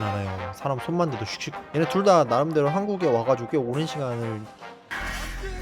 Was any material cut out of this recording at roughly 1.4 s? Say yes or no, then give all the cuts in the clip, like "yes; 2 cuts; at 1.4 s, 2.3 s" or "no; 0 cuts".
yes; 1 cut; at 1.4 s